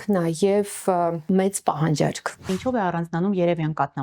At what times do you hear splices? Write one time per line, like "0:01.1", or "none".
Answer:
0:02.5